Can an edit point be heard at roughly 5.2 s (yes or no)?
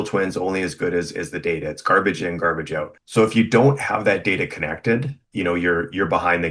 yes